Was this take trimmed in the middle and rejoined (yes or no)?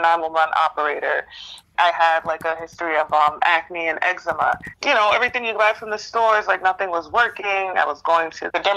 yes